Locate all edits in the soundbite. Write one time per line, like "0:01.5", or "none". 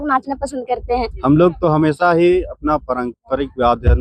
0:01.1